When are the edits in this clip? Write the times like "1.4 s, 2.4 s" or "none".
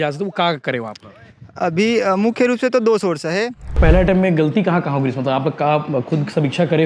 3.8 s